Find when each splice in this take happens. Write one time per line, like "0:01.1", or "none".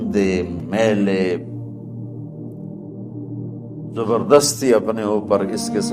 0:01.6
0:03.6